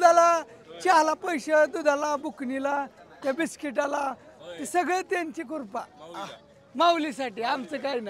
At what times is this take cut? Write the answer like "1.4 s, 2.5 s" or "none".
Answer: none